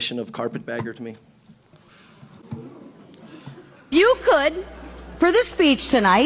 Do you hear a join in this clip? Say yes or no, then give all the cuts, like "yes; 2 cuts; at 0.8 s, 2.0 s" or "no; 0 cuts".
yes; 1 cut; at 3.9 s